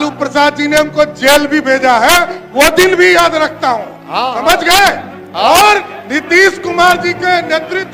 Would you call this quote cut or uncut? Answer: uncut